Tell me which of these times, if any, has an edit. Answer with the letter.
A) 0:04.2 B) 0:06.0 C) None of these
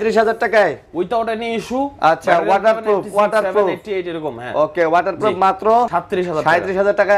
B